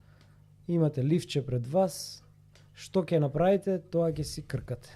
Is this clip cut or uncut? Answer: uncut